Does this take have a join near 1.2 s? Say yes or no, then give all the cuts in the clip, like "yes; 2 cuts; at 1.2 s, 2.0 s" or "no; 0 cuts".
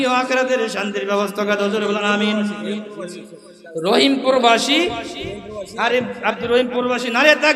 no; 0 cuts